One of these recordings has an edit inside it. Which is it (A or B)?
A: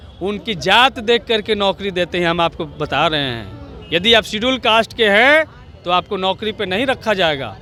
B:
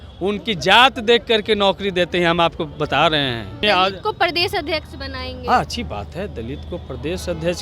B